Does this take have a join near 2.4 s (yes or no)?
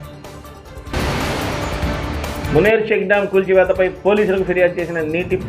yes